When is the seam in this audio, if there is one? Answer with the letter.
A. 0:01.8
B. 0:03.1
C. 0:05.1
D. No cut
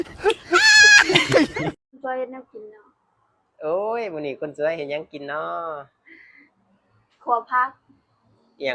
A